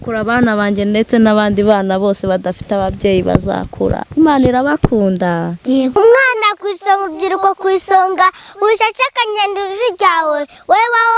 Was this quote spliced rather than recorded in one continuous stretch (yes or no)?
yes